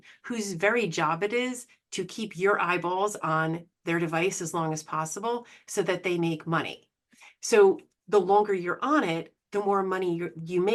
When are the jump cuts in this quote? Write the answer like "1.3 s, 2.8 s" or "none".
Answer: none